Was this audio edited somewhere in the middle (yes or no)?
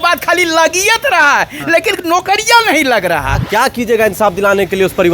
yes